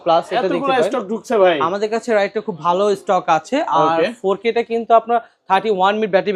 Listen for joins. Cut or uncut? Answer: uncut